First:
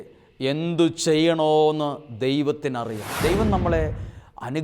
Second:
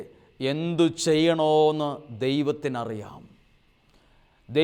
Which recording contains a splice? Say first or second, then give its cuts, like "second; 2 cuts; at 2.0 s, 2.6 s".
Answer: first; 1 cut; at 3.1 s